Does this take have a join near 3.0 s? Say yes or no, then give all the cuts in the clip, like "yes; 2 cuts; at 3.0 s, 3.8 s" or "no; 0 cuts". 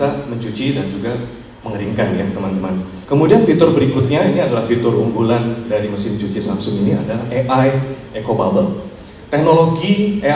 yes; 1 cut; at 3.0 s